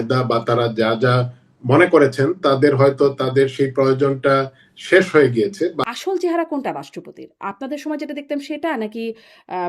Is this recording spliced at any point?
yes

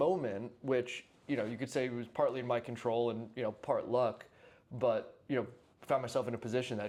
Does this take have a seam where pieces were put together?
no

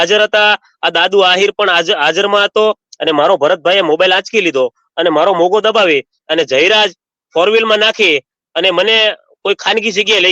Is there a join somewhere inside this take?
yes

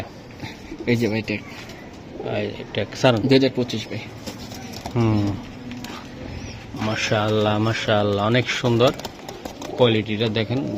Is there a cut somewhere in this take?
no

